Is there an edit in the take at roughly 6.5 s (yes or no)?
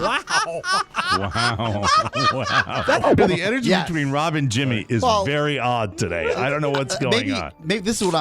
no